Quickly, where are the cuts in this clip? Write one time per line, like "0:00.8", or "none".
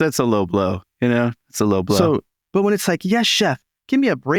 0:02.4